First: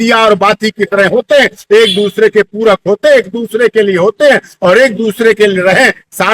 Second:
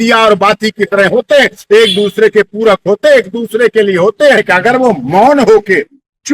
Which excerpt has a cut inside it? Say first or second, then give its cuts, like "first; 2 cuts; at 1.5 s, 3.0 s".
second; 1 cut; at 4.4 s